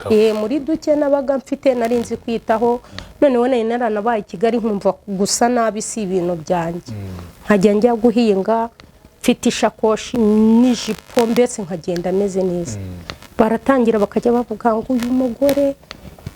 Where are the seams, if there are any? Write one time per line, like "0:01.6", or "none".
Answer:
0:10.1